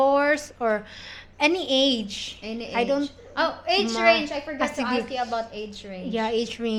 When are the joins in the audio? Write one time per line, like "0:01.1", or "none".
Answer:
none